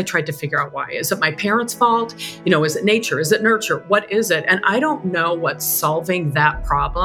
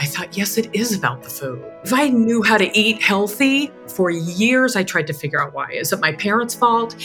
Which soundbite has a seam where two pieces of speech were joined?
second; 2 cuts; at 1.8 s, 3.8 s

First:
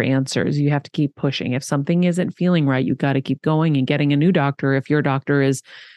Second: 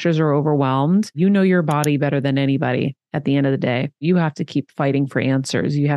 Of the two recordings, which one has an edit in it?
second; 2 cuts; at 1.1 s, 4.0 s

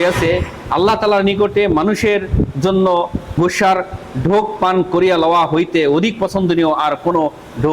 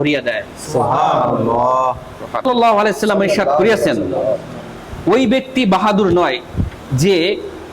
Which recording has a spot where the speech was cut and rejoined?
second; 1 cut; at 2.4 s

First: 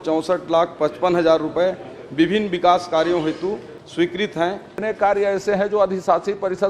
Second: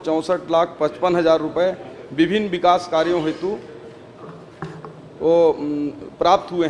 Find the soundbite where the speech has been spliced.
first; 2 cuts; at 3.8 s, 4.8 s

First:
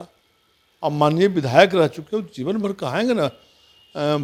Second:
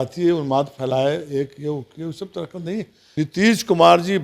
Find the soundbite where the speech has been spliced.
second; 1 cut; at 3.0 s

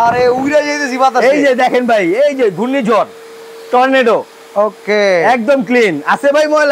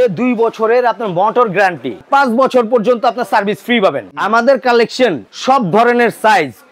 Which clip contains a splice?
second; 3 cuts; at 2.0 s, 4.1 s, 5.3 s

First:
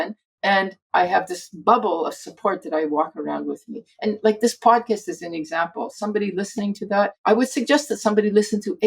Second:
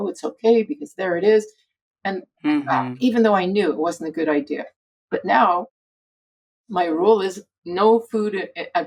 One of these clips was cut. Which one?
first; 1 cut; at 7.2 s

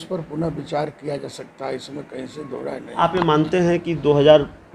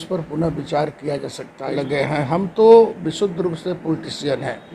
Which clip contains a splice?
second; 1 cut; at 1.8 s

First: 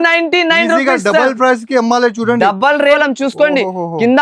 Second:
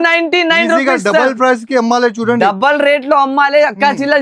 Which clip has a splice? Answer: first; 1 cut; at 3.0 s

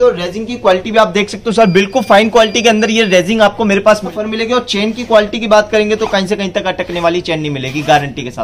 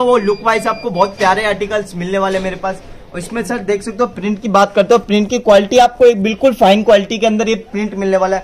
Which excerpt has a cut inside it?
first; 1 cut; at 4.1 s

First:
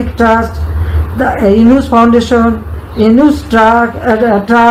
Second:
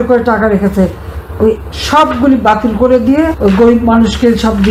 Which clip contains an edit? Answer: second; 1 cut; at 3.3 s

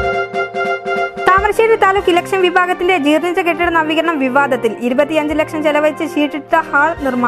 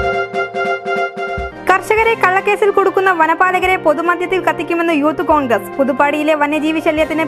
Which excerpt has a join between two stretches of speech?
first; 1 cut; at 1.1 s

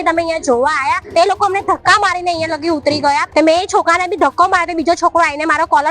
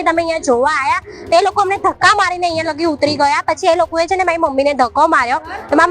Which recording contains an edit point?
first; 2 cuts; at 1.0 s, 3.2 s

